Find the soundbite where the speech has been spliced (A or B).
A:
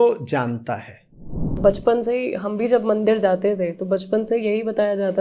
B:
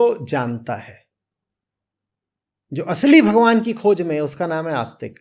A